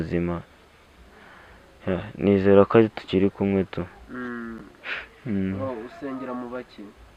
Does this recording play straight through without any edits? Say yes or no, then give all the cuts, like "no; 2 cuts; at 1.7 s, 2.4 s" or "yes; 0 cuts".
yes; 0 cuts